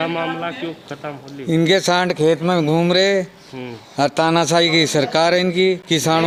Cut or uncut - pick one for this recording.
uncut